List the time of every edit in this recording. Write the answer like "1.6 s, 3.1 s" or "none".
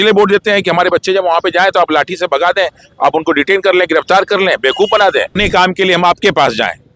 5.4 s